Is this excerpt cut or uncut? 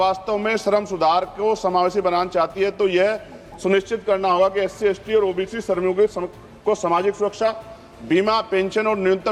uncut